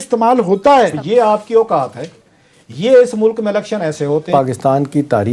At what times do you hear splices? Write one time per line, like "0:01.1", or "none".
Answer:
0:01.0
0:04.3